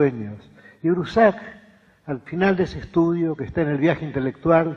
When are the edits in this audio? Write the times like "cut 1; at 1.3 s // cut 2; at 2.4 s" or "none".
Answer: cut 1; at 1.3 s